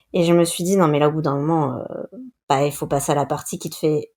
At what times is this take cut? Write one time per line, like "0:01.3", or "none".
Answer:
none

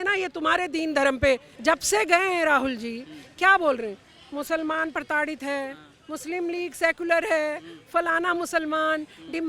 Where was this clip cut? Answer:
0:01.5

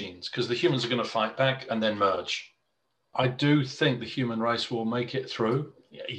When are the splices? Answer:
0:03.1

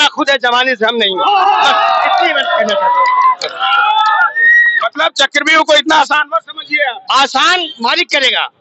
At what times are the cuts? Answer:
none

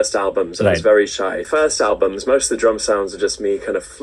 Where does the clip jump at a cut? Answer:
0:01.4

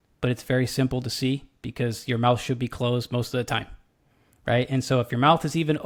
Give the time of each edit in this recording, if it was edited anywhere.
none

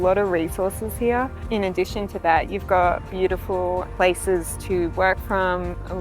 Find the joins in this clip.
0:01.4
0:03.9

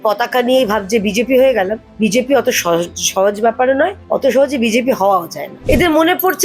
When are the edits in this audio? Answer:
0:01.8
0:04.0
0:05.5

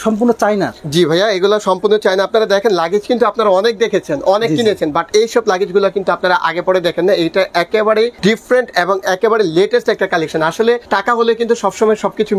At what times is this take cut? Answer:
none

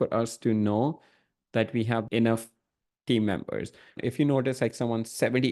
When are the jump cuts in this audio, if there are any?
0:02.1
0:03.9

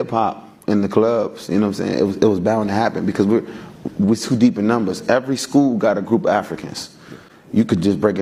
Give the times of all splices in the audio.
none

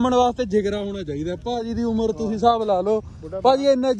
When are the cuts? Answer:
none

